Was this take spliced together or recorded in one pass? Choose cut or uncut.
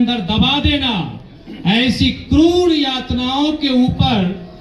uncut